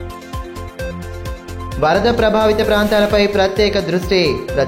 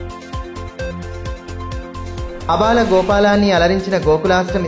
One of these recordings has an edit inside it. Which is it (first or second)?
first